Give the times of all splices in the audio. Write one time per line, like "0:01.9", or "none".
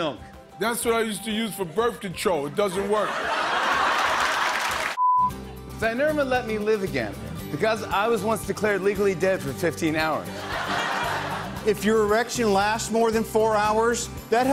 0:05.0